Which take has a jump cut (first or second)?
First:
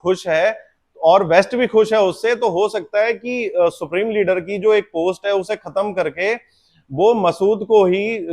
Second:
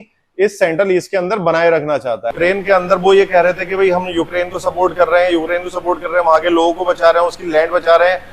second